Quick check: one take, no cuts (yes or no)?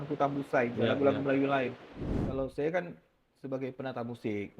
no